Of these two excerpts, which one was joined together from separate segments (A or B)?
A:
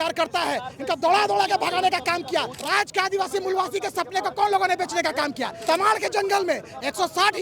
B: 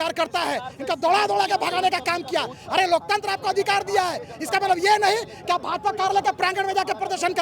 A